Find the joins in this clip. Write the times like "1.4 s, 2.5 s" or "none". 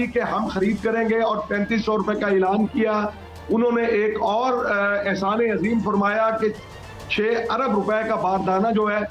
none